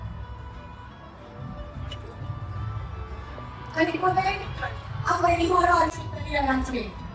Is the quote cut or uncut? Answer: cut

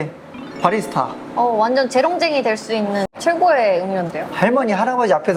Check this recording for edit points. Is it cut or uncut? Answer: uncut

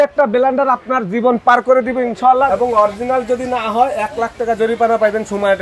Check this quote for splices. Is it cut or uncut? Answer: cut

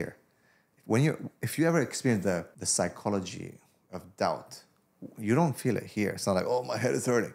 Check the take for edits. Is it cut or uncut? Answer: cut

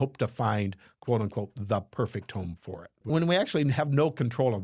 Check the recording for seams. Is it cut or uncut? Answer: cut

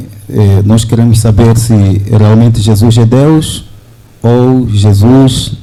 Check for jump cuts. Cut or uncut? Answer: uncut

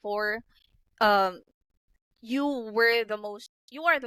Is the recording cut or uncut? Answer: uncut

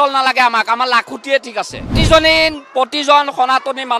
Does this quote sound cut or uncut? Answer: cut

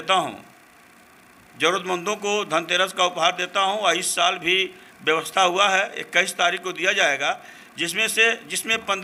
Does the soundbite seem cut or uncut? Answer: uncut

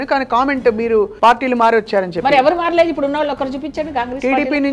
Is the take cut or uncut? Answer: cut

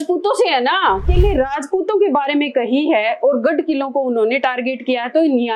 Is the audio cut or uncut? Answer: cut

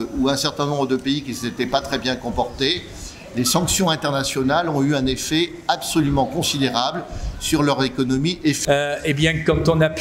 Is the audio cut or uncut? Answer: cut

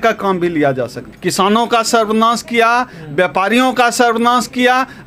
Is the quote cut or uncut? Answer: cut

